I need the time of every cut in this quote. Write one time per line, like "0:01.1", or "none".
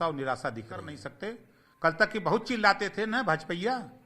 0:01.0